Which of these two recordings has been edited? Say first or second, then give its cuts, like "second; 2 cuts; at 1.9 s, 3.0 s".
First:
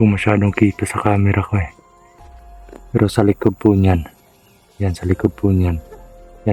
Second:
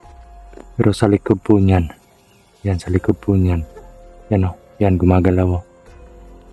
second; 1 cut; at 5.6 s